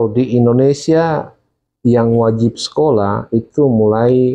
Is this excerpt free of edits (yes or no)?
yes